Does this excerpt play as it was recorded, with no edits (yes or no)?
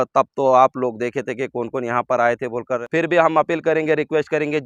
no